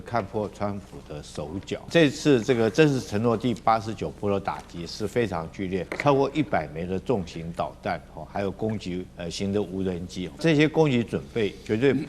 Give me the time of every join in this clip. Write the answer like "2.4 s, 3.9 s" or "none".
1.9 s, 5.9 s, 9.1 s, 10.4 s